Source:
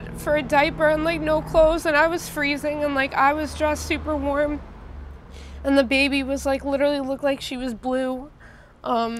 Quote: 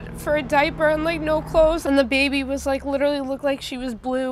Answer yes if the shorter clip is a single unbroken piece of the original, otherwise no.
no